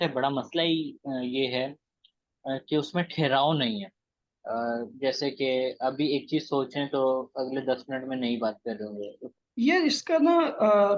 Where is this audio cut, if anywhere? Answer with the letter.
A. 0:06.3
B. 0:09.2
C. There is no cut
B